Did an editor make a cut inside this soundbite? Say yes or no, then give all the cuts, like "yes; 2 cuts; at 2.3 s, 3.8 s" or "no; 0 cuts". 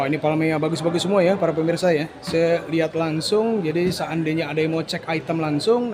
no; 0 cuts